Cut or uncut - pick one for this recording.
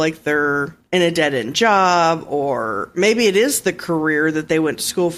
uncut